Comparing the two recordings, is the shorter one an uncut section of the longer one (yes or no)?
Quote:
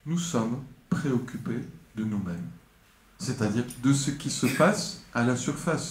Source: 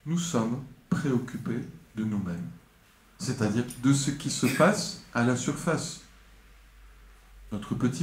yes